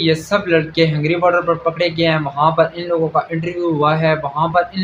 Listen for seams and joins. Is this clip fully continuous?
yes; 0 cuts

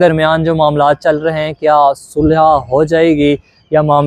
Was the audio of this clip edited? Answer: no; 0 cuts

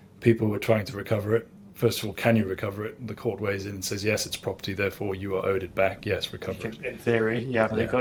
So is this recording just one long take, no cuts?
yes; 0 cuts

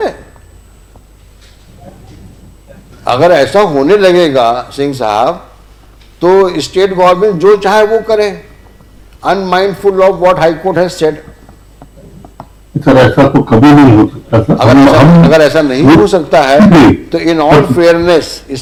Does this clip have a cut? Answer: no; 0 cuts

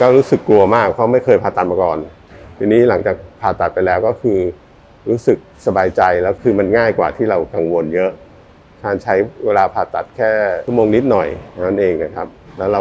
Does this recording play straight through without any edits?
yes; 0 cuts

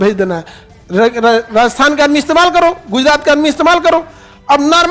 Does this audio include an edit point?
no; 0 cuts

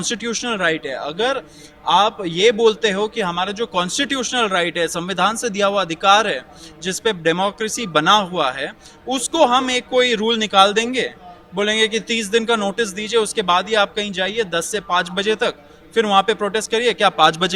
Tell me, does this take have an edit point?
no; 0 cuts

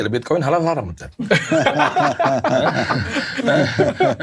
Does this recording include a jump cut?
no; 0 cuts

